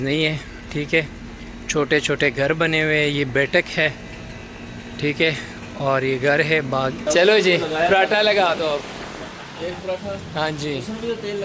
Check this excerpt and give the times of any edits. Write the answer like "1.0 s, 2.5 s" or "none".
2.8 s, 7.0 s

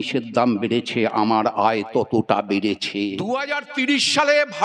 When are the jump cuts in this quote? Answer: 3.2 s

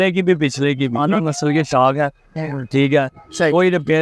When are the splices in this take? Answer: 1.2 s

